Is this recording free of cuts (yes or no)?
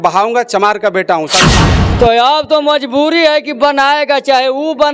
no